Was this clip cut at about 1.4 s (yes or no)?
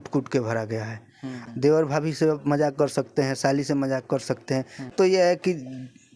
yes